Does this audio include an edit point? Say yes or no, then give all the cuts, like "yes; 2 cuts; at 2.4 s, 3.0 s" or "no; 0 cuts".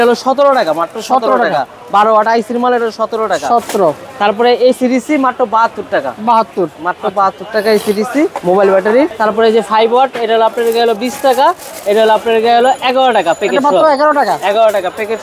no; 0 cuts